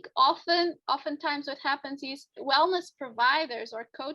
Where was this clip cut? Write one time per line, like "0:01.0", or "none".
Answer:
0:00.8
0:02.4